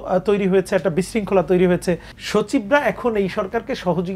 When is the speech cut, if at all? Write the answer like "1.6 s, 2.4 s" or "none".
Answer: 2.1 s